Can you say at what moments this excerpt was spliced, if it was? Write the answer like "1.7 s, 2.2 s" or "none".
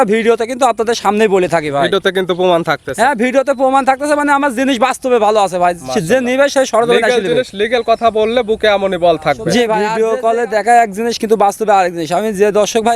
9.9 s